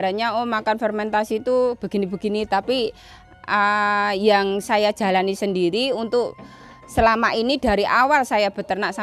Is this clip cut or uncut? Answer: uncut